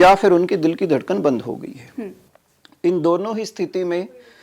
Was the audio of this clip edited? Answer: no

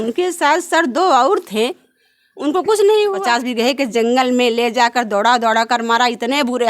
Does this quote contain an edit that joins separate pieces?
yes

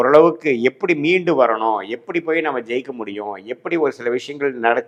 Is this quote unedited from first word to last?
yes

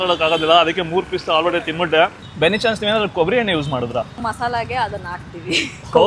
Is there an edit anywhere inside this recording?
yes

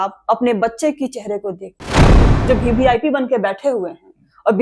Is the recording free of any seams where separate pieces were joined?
no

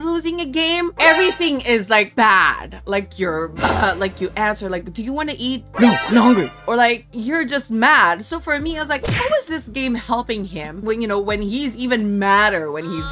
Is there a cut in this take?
no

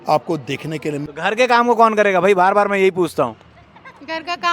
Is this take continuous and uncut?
no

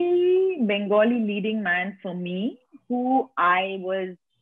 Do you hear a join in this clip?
no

